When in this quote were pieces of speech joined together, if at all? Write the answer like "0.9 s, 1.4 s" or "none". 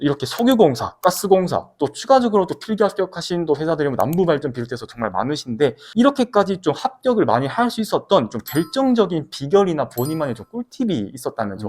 5.8 s